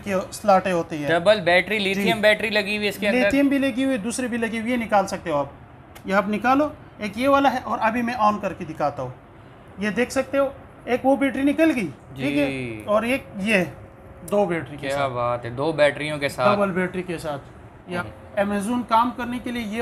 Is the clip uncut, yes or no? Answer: no